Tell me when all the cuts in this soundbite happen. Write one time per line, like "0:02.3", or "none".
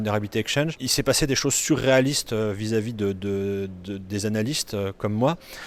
none